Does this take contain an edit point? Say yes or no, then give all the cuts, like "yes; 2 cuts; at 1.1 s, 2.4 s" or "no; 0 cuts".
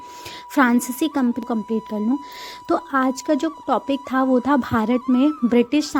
yes; 1 cut; at 1.4 s